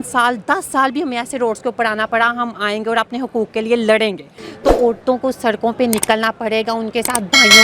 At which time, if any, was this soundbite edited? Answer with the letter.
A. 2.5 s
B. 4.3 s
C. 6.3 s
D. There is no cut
D